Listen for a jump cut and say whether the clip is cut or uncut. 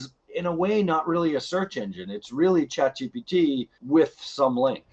cut